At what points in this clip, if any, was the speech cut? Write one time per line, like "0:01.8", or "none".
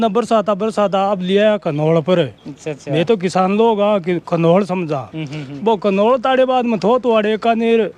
none